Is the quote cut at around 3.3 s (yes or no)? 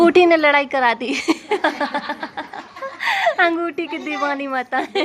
no